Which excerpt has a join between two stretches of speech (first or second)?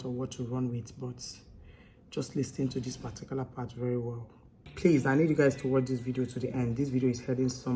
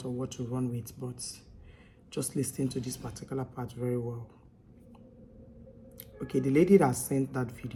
first